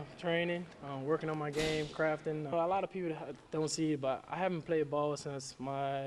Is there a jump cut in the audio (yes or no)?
yes